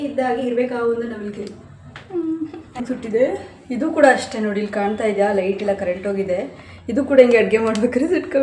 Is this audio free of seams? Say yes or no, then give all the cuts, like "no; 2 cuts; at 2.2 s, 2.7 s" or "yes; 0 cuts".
no; 1 cut; at 2.7 s